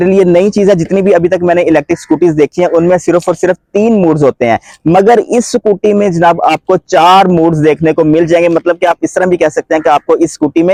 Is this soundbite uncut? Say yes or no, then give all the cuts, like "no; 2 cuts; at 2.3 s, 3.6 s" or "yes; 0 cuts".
yes; 0 cuts